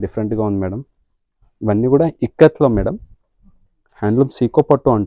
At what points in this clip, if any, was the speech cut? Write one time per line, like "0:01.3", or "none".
none

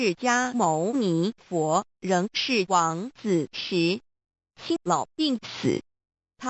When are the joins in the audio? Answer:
0:04.8

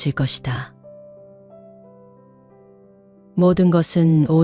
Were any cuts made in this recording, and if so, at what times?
0:01.3
0:02.9

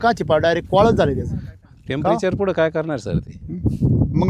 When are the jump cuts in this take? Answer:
none

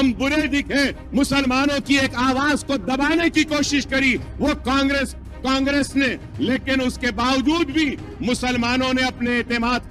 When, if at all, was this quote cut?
none

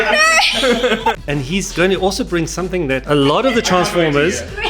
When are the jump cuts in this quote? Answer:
0:01.1
0:03.0

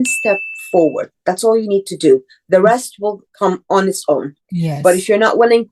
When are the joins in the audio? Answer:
0:03.4
0:04.4

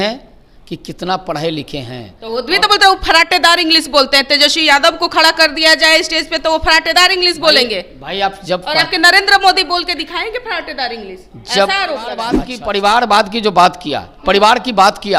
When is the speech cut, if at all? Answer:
0:12.5

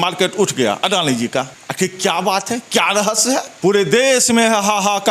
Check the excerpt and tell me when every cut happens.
0:01.6
0:03.5

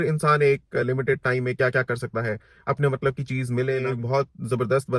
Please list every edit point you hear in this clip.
0:03.8

